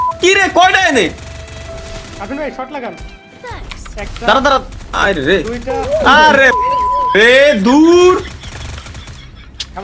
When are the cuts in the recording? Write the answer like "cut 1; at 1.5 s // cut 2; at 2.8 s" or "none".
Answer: none